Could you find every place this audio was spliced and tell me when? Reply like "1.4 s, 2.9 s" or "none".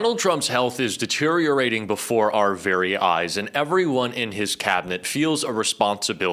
none